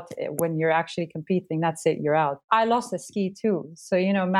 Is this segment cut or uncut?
cut